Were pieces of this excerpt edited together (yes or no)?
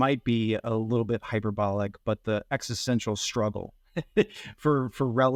no